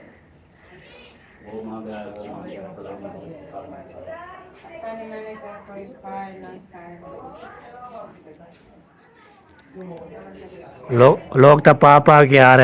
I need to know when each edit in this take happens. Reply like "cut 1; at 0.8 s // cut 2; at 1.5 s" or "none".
none